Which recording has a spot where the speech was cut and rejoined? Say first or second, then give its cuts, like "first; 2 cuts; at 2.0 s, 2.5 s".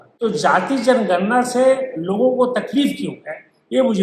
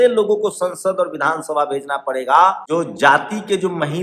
second; 1 cut; at 2.6 s